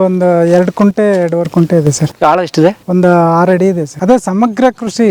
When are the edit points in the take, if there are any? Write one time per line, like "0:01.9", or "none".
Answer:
0:02.1
0:02.8
0:03.9